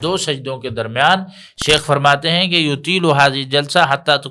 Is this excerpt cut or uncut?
uncut